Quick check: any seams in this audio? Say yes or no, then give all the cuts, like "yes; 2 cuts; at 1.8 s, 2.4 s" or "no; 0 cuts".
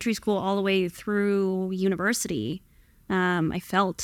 no; 0 cuts